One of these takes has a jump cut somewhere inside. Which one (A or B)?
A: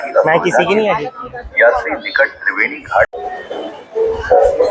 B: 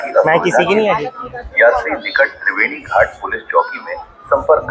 A